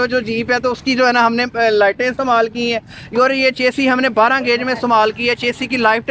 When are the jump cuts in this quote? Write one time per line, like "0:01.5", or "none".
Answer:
none